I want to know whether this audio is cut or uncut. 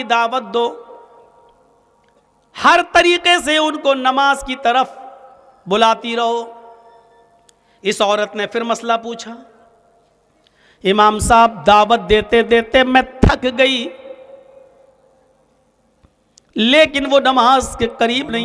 uncut